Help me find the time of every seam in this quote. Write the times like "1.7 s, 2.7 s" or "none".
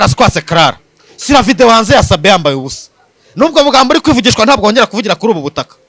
none